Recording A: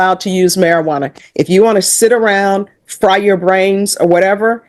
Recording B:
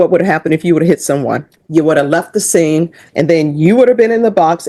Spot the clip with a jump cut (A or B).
B